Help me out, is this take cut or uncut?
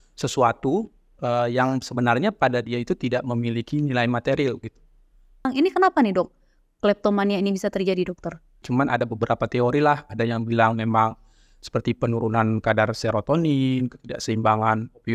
cut